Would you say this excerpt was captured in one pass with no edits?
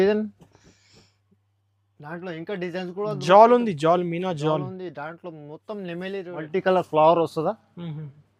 no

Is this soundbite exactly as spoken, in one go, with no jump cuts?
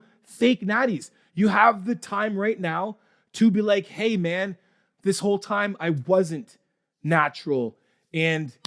yes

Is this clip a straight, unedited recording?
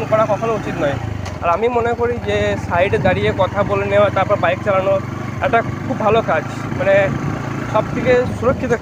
yes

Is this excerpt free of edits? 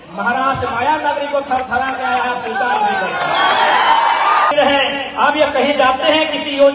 no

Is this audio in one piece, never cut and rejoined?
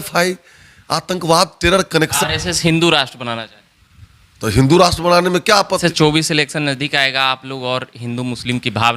no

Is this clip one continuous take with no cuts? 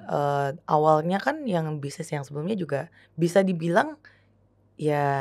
yes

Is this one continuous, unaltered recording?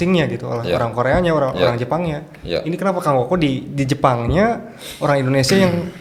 yes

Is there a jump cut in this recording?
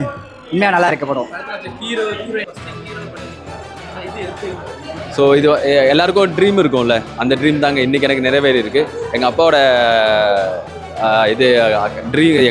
yes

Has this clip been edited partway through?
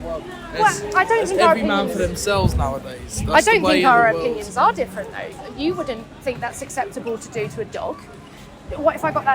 no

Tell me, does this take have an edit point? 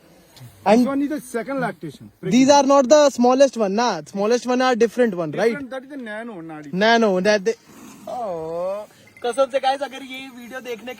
yes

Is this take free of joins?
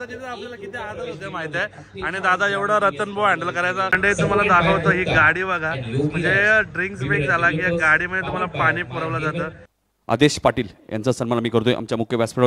no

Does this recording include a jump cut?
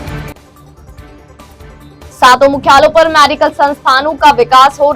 yes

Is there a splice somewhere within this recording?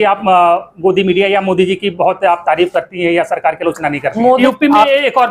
yes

